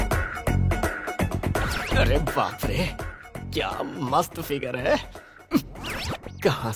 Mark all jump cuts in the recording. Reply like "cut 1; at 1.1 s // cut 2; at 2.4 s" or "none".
none